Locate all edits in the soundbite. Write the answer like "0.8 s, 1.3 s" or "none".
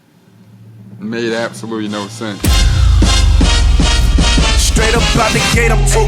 2.4 s